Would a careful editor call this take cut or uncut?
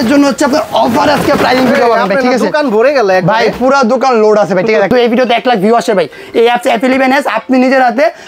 cut